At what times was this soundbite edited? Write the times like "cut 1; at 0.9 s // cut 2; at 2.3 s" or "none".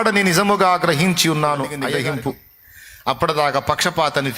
cut 1; at 1.8 s